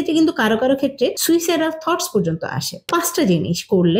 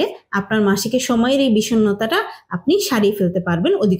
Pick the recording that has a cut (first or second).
first